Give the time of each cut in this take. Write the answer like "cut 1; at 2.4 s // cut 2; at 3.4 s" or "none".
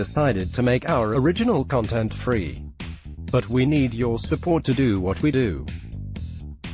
cut 1; at 5.6 s